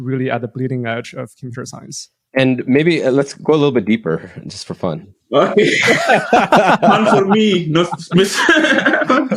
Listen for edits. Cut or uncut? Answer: uncut